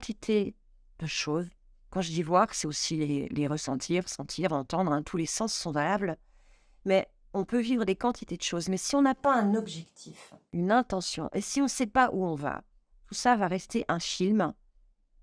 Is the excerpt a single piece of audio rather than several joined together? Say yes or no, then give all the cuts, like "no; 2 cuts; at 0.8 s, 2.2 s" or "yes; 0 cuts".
yes; 0 cuts